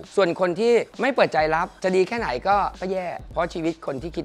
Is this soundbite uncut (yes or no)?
no